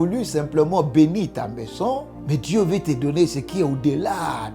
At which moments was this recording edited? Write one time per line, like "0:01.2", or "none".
0:02.1